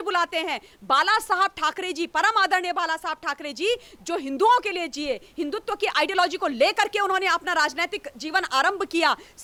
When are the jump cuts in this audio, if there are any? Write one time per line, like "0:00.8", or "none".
none

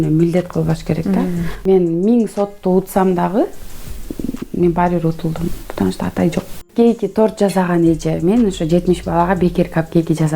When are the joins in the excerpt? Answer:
0:01.5
0:06.7

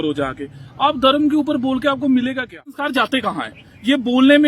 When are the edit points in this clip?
0:02.8

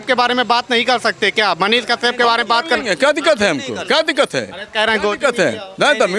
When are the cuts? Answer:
none

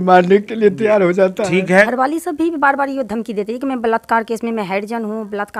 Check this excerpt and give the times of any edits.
0:01.9

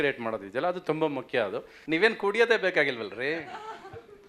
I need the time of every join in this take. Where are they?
0:01.7

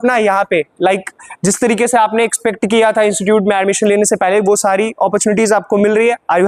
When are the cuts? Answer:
none

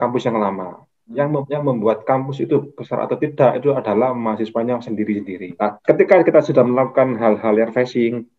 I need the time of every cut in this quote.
0:05.4

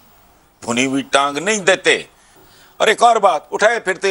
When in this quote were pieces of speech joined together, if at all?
0:02.4

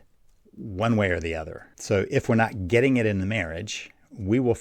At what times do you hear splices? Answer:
none

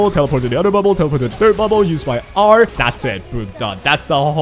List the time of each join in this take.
0:02.8

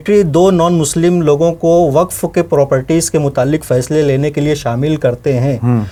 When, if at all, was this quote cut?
none

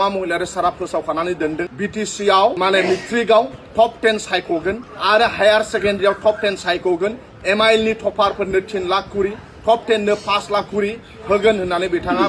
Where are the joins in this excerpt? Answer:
0:01.7
0:02.6
0:04.9

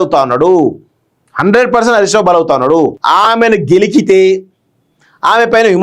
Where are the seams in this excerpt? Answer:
0:03.0

